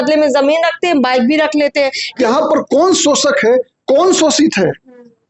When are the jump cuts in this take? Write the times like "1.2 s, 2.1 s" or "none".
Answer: 2.0 s